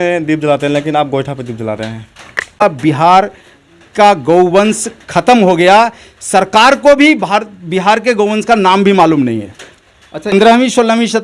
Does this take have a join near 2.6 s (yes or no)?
yes